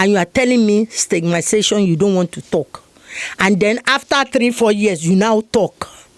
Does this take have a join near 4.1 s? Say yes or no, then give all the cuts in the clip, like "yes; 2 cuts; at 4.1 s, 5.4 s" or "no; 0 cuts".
no; 0 cuts